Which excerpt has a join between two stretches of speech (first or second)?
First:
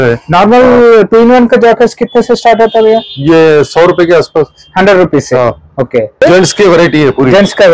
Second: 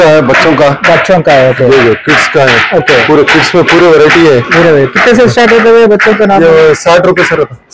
first